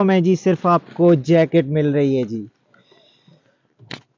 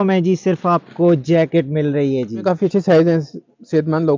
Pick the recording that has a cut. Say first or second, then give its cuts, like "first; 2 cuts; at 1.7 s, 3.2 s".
second; 1 cut; at 2.4 s